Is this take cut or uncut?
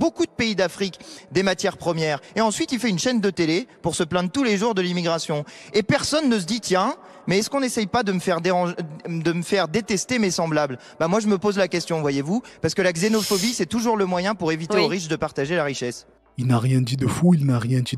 uncut